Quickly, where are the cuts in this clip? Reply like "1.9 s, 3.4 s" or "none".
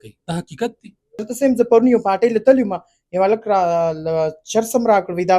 1.2 s